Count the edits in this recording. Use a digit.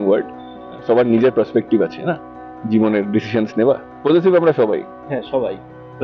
1